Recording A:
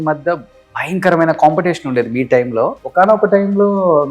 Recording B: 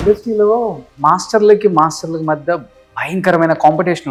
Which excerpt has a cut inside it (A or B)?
A